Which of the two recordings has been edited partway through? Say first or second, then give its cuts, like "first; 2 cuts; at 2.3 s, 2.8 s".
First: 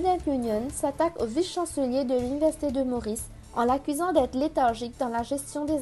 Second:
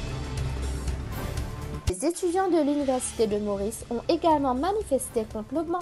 second; 1 cut; at 1.8 s